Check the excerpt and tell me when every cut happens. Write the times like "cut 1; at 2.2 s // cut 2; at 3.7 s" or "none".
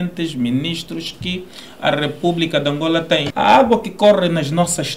cut 1; at 3.3 s